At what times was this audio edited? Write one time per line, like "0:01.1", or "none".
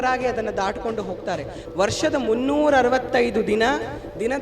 0:01.6